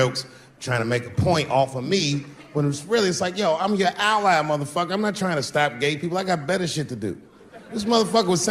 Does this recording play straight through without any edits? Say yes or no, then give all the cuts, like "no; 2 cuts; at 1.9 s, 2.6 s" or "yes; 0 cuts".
yes; 0 cuts